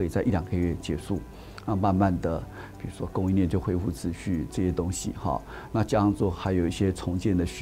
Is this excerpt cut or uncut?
uncut